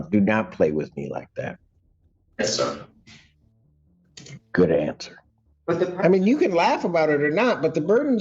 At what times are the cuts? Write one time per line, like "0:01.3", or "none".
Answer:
0:05.6